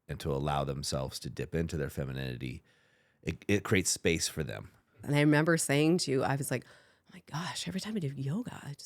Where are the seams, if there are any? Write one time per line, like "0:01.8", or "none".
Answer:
0:05.0